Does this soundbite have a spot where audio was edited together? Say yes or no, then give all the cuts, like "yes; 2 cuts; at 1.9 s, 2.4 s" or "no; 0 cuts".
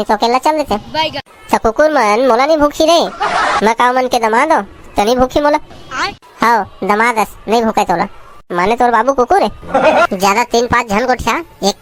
no; 0 cuts